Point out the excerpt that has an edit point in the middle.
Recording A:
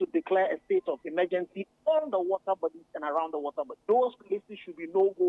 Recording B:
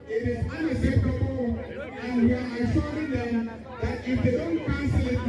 A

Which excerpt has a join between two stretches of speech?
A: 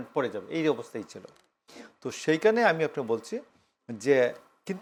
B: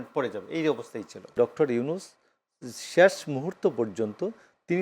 B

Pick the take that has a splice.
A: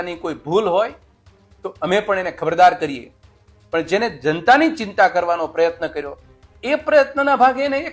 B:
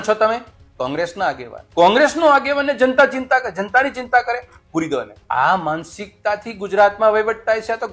B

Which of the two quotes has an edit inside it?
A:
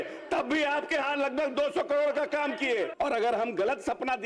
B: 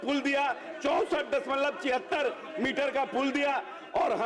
A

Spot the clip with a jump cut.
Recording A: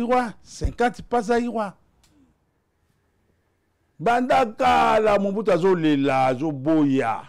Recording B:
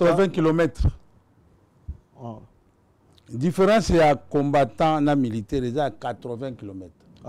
A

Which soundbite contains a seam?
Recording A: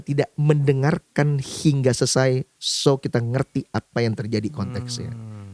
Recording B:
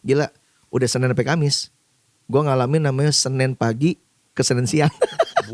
B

